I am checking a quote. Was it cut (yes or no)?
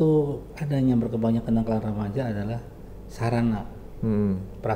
no